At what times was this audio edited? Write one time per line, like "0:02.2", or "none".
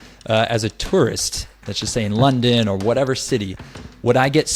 none